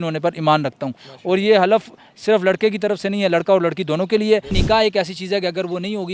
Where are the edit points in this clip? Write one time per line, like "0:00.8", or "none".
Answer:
0:04.6